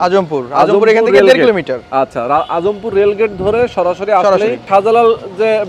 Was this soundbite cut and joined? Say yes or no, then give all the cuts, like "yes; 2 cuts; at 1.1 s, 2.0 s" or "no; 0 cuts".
yes; 1 cut; at 4.6 s